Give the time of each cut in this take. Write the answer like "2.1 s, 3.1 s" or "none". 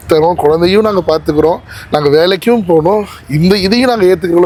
none